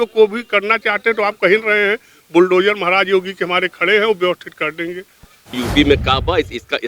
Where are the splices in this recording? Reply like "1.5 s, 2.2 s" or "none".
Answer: 5.6 s